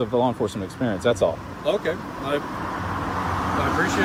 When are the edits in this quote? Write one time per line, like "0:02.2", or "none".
none